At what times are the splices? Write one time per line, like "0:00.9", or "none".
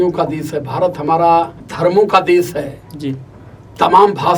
0:01.6

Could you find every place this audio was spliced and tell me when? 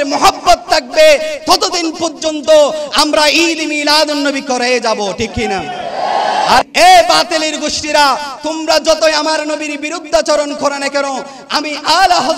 0:06.6

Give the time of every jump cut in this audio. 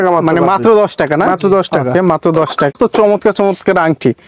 0:02.8

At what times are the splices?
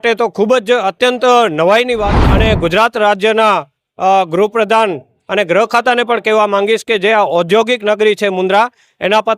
0:02.2

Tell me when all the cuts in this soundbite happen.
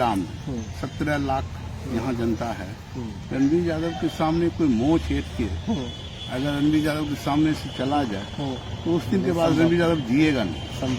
none

